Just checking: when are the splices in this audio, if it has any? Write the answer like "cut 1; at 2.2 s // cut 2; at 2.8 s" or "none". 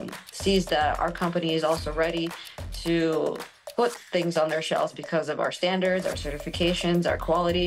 none